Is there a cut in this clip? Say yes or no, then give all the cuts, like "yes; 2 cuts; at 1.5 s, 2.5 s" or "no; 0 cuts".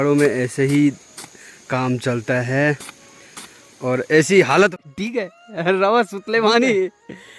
yes; 1 cut; at 5.0 s